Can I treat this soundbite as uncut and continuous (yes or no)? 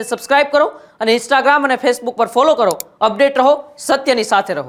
yes